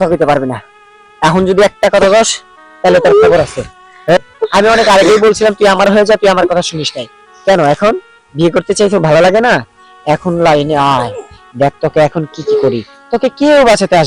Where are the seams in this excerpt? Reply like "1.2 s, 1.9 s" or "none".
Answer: 4.2 s